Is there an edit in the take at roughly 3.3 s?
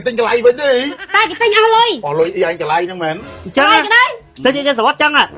no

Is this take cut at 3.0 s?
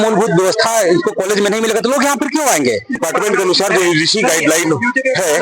yes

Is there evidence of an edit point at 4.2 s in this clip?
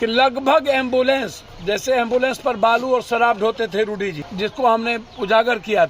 yes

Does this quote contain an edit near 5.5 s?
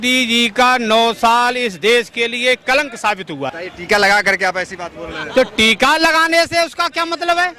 no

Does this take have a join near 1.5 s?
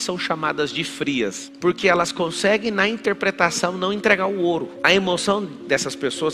yes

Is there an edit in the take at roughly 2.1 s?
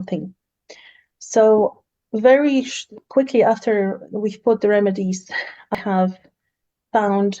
no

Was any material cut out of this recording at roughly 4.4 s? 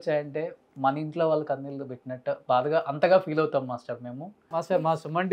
yes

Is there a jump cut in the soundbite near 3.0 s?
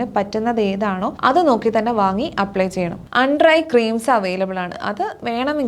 yes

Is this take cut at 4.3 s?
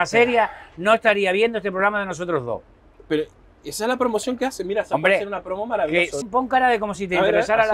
no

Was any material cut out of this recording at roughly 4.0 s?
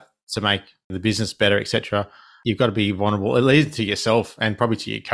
no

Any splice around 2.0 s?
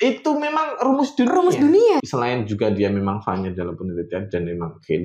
yes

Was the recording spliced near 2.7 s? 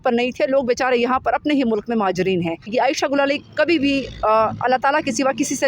yes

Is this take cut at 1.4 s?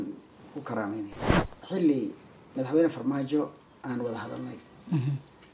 yes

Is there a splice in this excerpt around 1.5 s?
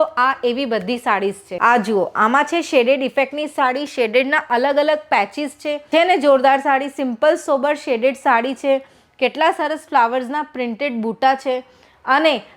yes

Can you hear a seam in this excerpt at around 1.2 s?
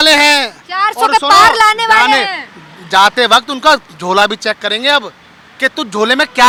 no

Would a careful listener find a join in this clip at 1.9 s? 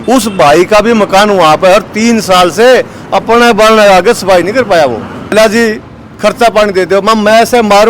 no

